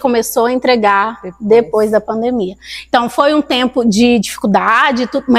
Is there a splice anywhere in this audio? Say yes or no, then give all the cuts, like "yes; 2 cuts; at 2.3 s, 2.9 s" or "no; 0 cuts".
no; 0 cuts